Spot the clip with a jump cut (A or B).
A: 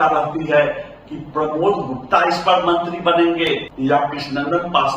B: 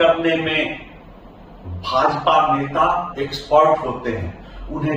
A